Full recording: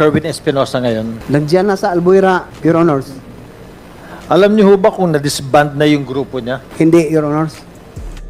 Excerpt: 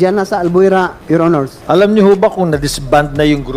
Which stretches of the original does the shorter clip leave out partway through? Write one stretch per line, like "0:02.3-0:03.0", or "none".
0:02.5-0:03.6